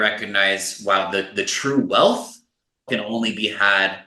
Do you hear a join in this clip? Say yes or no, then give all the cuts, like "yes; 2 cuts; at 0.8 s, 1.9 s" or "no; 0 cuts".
yes; 1 cut; at 2.9 s